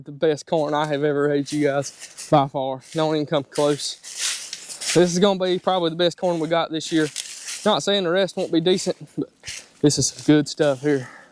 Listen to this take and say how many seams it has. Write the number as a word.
zero